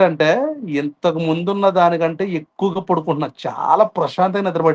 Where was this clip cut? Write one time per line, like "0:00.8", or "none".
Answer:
none